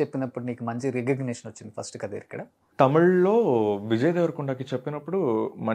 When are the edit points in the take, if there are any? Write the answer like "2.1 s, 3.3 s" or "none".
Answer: 2.6 s

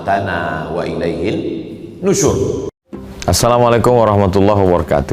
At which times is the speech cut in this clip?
2.8 s

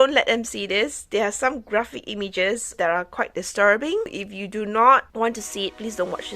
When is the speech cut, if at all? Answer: 2.7 s, 4.0 s, 5.1 s

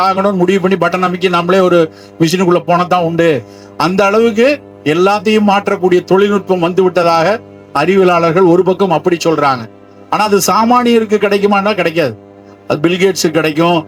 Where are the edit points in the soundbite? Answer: none

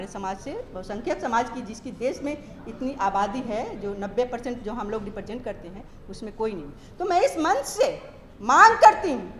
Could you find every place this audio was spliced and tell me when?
none

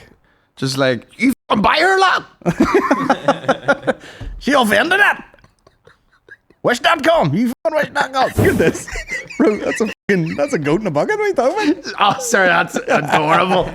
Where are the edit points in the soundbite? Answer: 8.4 s

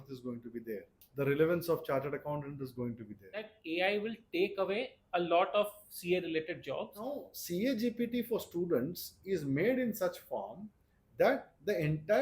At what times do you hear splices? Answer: 1.0 s, 3.5 s, 7.3 s

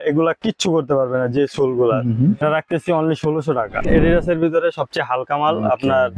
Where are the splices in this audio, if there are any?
2.4 s, 3.8 s

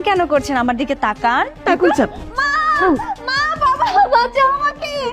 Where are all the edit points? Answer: 1.5 s

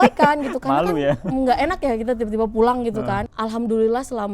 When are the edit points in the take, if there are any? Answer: 3.3 s

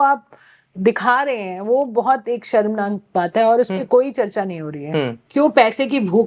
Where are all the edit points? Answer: 5.2 s

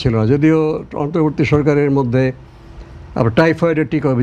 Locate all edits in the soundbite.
none

